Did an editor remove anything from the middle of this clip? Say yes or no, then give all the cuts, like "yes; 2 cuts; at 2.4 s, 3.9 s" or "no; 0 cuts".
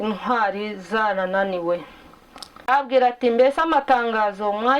yes; 1 cut; at 2.7 s